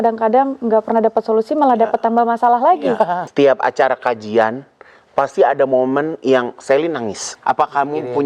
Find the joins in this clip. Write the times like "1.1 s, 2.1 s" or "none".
3.2 s, 7.3 s